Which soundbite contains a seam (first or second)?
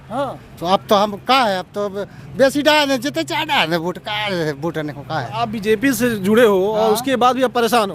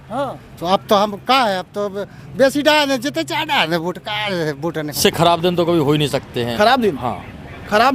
second